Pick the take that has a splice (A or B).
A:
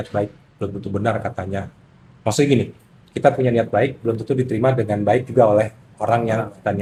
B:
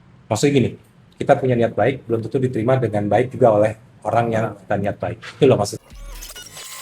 B